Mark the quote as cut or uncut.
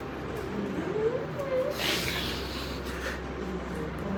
uncut